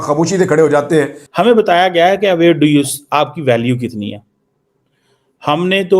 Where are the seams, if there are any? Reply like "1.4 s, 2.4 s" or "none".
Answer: 1.2 s